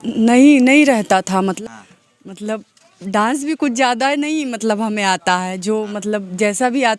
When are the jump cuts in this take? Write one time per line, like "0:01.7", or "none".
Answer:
0:01.5